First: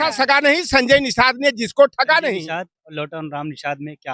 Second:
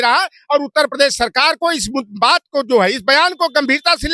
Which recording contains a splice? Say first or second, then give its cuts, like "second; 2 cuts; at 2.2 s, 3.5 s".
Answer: first; 1 cut; at 2.4 s